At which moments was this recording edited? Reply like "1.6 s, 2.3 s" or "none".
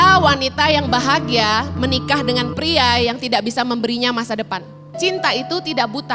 5.0 s